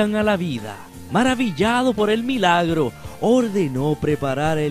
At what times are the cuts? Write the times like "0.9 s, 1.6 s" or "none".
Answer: 3.7 s